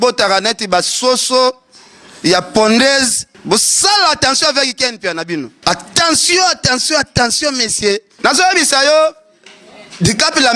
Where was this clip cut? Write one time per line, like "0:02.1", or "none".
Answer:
0:03.3
0:05.5
0:08.1